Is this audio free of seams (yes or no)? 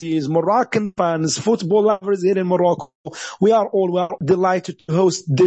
no